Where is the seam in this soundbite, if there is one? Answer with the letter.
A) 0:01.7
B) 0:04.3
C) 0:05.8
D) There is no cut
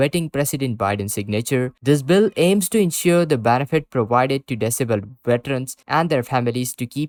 D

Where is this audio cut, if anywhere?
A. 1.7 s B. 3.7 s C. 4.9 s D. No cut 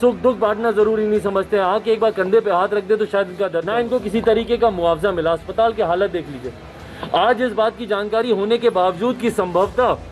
B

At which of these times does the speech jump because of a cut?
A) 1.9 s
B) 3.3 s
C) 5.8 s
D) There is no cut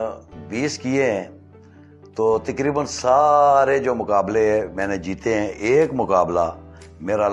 D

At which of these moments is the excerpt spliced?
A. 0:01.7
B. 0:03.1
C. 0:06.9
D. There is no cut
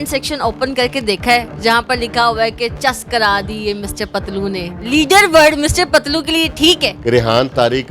C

